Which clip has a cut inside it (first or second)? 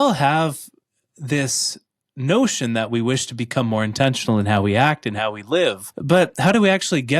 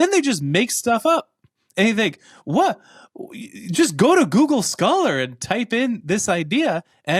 first